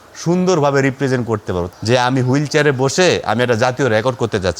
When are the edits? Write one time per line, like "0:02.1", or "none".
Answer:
0:01.7

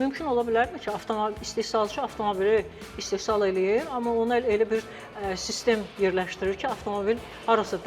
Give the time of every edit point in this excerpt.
none

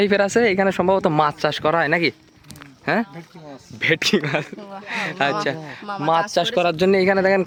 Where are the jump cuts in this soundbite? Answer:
none

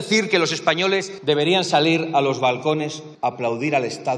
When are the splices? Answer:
0:01.1
0:03.0

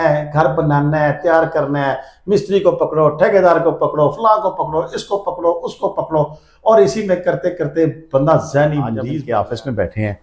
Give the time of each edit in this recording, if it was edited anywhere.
0:09.0

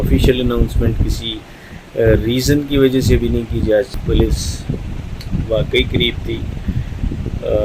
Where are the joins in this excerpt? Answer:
0:04.0

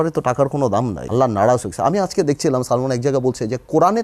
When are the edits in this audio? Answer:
0:01.0

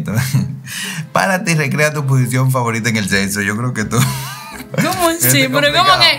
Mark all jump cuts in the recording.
0:04.7

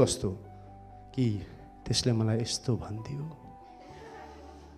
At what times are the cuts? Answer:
none

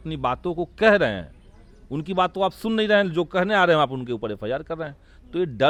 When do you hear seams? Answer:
none

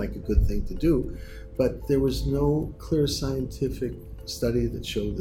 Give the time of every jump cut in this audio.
0:02.8

